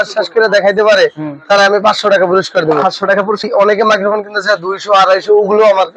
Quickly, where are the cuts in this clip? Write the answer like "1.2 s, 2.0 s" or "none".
3.5 s